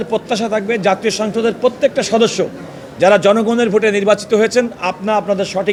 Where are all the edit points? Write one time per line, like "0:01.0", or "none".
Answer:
none

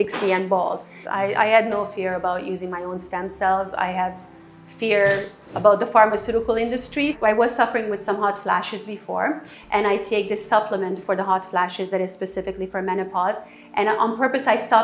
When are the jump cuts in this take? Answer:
0:00.9
0:07.1

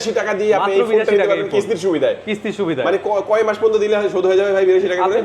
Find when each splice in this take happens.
none

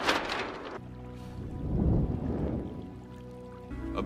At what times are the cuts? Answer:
none

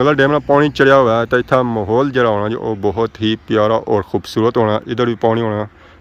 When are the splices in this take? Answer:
none

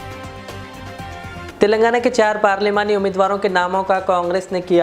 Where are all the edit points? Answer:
0:01.5

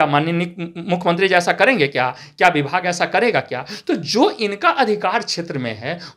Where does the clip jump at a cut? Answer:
none

